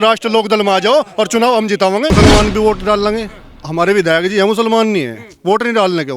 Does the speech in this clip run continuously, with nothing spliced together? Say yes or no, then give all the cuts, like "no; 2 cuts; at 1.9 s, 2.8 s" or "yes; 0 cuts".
no; 1 cut; at 2.1 s